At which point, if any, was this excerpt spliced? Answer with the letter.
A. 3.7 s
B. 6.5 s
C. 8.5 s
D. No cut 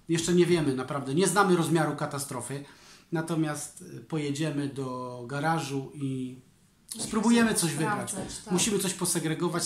D